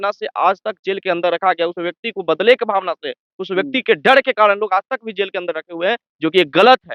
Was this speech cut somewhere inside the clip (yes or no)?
no